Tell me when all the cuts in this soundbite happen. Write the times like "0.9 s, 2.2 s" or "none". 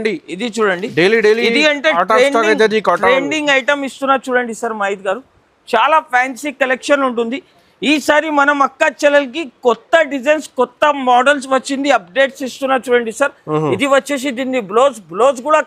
none